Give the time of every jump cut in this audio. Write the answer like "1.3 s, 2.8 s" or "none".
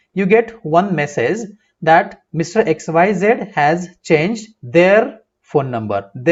none